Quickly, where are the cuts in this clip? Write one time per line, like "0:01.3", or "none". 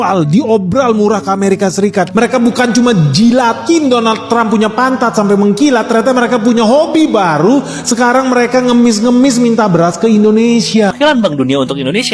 0:10.9